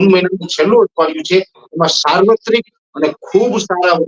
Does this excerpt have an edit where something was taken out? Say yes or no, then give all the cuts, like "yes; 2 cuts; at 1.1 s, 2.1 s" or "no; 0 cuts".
no; 0 cuts